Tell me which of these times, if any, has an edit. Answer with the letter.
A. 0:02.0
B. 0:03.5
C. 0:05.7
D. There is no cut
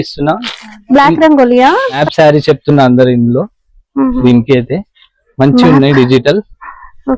A